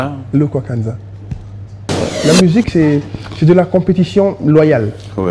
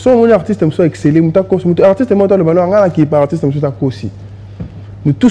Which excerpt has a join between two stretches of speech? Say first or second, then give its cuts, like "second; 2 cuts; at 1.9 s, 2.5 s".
first; 1 cut; at 2.1 s